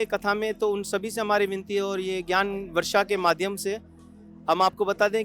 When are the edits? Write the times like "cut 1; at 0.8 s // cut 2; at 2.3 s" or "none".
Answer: none